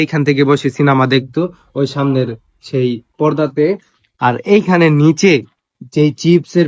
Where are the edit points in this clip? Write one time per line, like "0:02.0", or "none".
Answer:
none